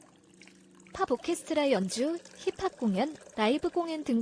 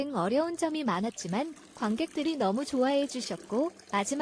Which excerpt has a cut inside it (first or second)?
first